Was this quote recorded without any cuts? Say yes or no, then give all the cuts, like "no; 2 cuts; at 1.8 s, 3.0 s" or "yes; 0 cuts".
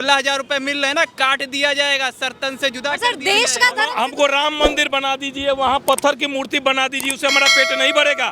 no; 1 cut; at 3.9 s